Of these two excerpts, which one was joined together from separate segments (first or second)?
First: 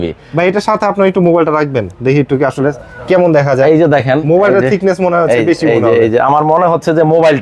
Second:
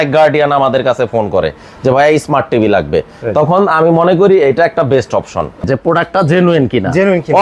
second